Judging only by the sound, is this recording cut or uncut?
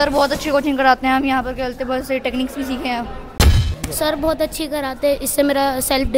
cut